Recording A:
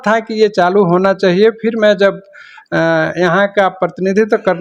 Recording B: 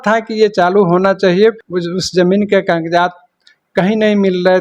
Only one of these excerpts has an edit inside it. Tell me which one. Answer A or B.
B